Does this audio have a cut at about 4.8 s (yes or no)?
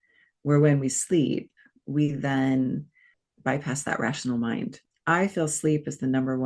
yes